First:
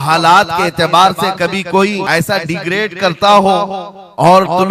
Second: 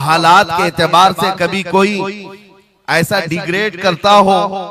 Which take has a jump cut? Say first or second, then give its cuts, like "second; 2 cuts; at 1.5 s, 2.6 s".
first; 1 cut; at 2.0 s